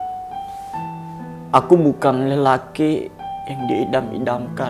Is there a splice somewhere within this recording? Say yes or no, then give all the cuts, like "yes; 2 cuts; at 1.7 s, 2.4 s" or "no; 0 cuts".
no; 0 cuts